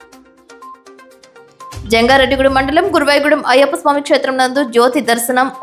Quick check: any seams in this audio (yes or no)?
no